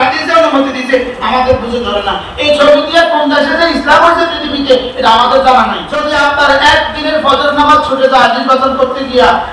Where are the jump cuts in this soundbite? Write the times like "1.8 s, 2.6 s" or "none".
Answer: 5.9 s